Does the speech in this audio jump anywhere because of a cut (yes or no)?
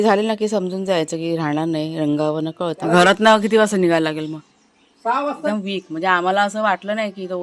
yes